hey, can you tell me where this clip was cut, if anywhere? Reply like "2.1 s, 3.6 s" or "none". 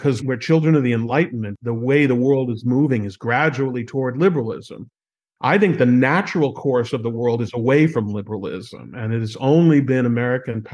1.5 s